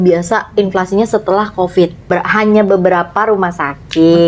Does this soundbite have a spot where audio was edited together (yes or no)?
yes